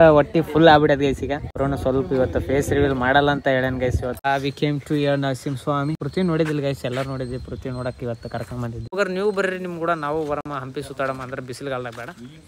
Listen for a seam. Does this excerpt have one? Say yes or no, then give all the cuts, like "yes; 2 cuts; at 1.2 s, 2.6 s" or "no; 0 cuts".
yes; 4 cuts; at 1.5 s, 4.2 s, 6.0 s, 8.9 s